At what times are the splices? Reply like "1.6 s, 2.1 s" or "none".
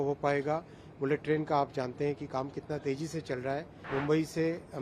3.8 s